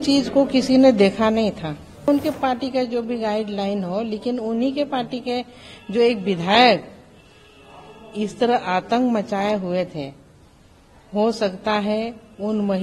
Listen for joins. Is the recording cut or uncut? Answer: cut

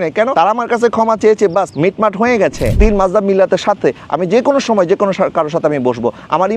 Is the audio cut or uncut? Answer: cut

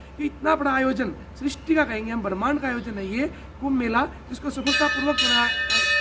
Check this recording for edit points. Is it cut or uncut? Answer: uncut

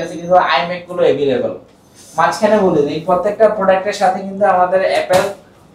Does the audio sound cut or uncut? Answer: uncut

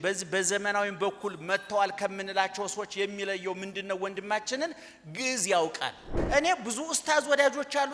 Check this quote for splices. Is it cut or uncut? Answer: cut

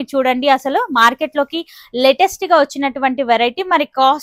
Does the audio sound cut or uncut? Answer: uncut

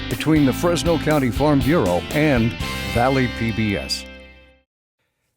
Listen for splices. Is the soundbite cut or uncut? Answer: cut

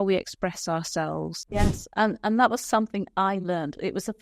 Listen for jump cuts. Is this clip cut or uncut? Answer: cut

